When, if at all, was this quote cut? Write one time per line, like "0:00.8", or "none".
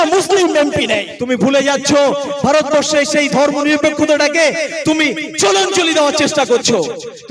0:01.1